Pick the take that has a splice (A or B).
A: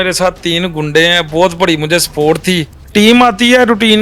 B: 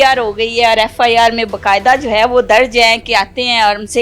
A